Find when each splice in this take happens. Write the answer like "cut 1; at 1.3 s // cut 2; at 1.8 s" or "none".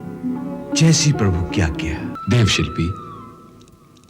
cut 1; at 2.1 s